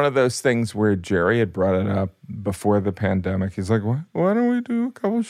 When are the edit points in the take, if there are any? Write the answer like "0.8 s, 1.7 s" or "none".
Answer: none